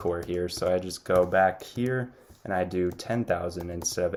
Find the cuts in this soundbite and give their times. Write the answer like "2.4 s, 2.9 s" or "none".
none